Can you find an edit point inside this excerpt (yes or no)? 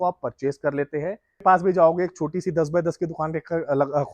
yes